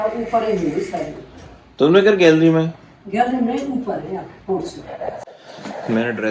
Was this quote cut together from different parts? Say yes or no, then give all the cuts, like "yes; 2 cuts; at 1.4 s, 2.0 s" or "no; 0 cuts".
yes; 1 cut; at 5.3 s